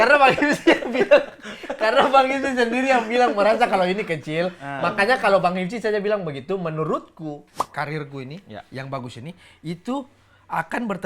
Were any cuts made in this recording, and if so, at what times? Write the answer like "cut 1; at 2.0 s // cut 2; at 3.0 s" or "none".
cut 1; at 7.5 s